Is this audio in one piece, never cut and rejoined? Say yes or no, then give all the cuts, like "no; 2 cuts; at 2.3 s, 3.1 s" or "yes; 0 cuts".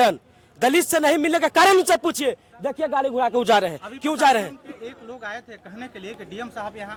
yes; 0 cuts